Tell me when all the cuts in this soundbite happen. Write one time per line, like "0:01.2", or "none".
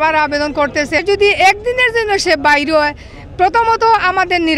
0:01.0